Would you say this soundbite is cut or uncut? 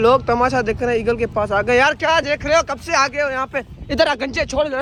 uncut